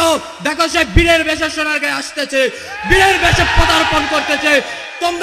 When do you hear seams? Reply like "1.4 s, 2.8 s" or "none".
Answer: none